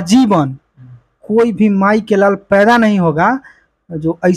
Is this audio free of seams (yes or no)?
yes